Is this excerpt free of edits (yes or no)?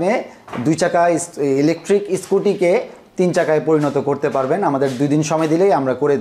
yes